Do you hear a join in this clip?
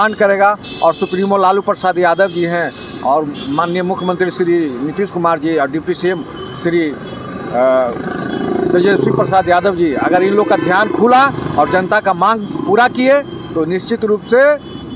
no; 0 cuts

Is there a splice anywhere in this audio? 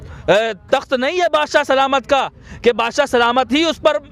no; 0 cuts

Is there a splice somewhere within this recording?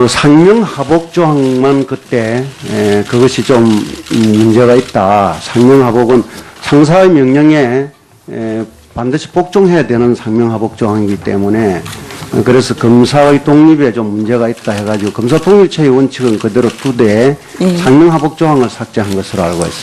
yes; 1 cut; at 6.2 s

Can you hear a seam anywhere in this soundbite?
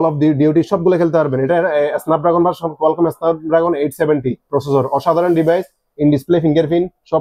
no; 0 cuts

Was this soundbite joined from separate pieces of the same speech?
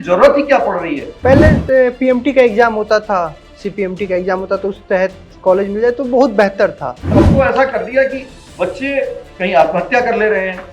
yes; 2 cuts; at 1.0 s, 7.0 s

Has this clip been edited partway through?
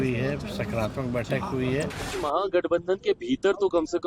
yes; 1 cut; at 2.1 s

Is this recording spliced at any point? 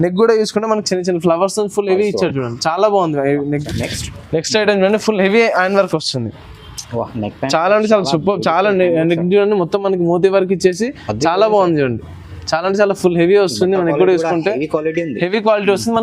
yes; 1 cut; at 3.6 s

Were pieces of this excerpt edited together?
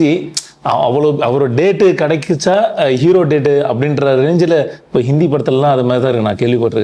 no; 0 cuts

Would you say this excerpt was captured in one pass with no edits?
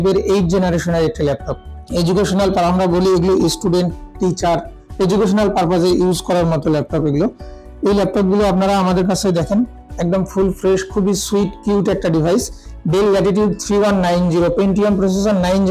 yes; 0 cuts

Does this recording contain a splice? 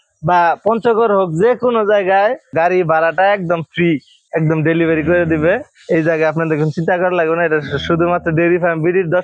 no; 0 cuts

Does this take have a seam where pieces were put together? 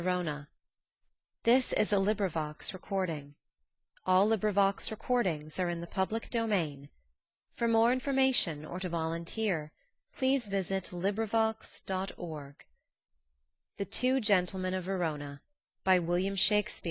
no; 0 cuts

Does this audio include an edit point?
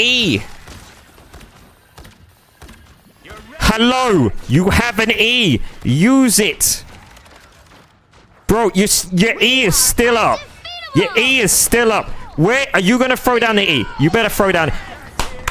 no; 0 cuts

